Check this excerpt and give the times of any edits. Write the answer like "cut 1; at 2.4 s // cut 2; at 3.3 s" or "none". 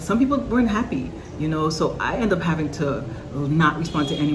none